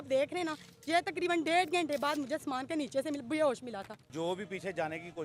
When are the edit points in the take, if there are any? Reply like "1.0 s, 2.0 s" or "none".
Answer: 4.1 s